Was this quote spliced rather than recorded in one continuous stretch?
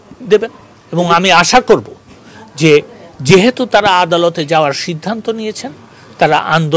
no; 0 cuts

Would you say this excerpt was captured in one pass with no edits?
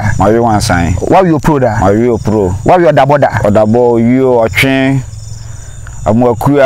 yes; 0 cuts

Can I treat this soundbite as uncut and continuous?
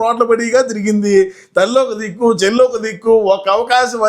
yes; 0 cuts

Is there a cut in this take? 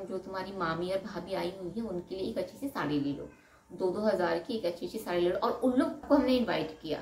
yes; 1 cut; at 6.0 s

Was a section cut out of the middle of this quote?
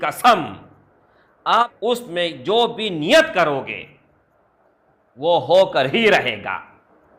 yes; 1 cut; at 1.6 s

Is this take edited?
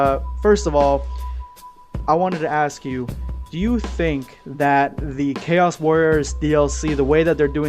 yes; 1 cut; at 3.0 s

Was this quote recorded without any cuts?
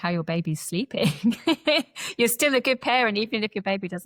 yes; 0 cuts

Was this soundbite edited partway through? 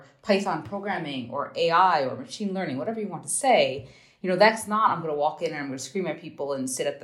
no; 0 cuts

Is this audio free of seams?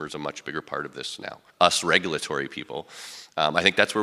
no; 1 cut; at 1.4 s

